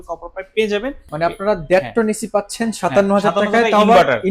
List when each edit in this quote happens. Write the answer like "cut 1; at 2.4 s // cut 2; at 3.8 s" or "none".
cut 1; at 1.0 s